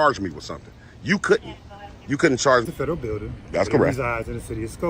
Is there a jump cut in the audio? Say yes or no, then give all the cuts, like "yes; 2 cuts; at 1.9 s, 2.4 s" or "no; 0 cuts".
yes; 1 cut; at 2.7 s